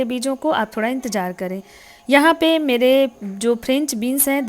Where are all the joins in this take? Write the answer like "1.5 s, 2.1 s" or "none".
none